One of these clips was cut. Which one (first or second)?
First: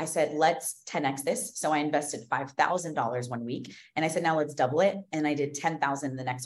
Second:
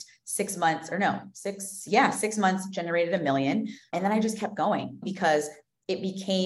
second